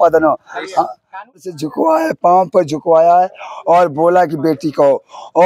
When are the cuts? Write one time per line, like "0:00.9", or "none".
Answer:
0:01.5